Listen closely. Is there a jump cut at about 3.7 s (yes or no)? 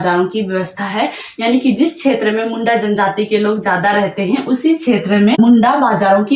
no